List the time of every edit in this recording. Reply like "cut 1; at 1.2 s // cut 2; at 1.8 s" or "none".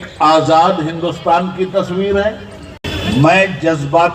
cut 1; at 2.9 s